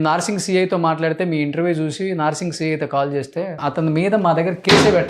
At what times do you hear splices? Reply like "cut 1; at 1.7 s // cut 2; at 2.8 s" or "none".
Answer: cut 1; at 3.6 s